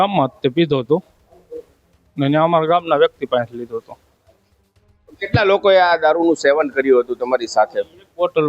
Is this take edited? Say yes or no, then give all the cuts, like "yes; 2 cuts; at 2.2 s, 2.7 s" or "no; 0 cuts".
no; 0 cuts